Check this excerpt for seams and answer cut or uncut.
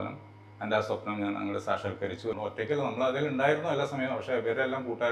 cut